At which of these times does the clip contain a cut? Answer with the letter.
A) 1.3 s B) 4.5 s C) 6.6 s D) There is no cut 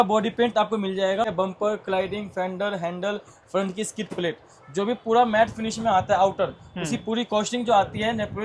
A